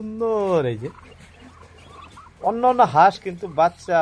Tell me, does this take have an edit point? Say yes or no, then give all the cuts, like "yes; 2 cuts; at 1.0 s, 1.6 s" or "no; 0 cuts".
no; 0 cuts